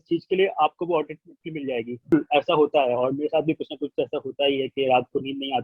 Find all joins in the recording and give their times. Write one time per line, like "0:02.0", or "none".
0:02.1